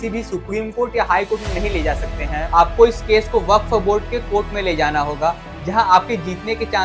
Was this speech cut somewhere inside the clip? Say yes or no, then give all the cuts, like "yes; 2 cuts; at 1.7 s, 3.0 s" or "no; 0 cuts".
no; 0 cuts